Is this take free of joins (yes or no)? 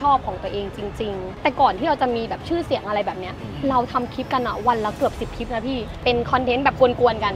no